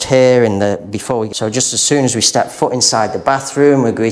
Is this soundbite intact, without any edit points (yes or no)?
no